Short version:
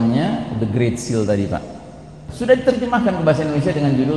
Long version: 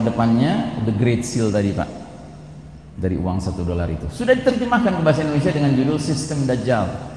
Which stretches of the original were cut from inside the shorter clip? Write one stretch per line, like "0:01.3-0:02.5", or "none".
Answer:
0:02.5-0:04.0